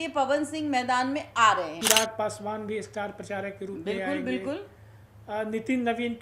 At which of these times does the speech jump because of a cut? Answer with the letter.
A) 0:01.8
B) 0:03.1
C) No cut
A